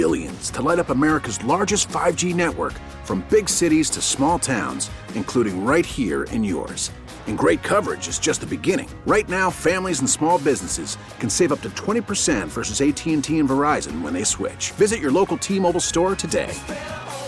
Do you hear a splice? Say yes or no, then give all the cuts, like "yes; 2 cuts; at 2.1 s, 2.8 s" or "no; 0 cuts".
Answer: no; 0 cuts